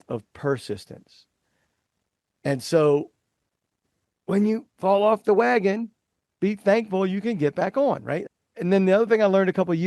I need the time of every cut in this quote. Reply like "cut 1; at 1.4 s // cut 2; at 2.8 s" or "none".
cut 1; at 8.2 s